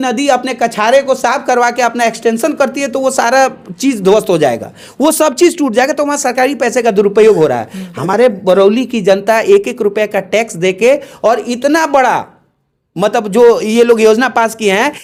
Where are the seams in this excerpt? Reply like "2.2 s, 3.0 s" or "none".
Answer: none